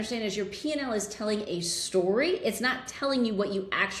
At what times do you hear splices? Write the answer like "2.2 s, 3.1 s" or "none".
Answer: none